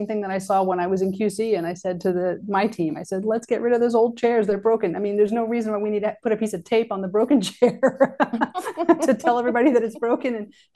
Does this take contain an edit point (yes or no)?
no